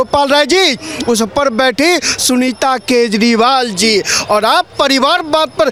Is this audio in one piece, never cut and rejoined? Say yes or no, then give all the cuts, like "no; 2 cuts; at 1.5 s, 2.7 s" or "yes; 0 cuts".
yes; 0 cuts